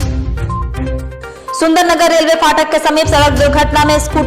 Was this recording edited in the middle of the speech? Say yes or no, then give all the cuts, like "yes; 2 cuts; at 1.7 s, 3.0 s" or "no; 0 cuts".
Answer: yes; 1 cut; at 0.9 s